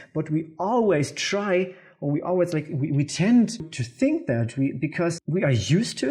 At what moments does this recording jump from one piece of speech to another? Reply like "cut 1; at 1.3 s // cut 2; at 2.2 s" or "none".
cut 1; at 3.8 s // cut 2; at 5.2 s